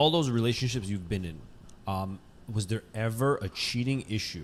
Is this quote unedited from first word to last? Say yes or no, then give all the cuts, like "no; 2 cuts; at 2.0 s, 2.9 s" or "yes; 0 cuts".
yes; 0 cuts